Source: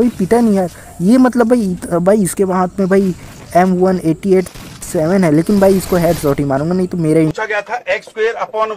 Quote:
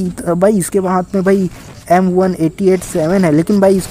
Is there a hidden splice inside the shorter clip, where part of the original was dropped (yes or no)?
yes